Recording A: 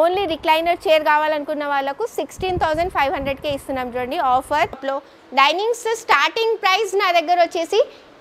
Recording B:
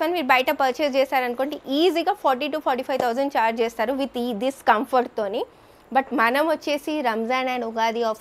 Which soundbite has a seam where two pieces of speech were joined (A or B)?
A